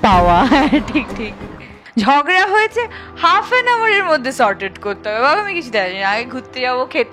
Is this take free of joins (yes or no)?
no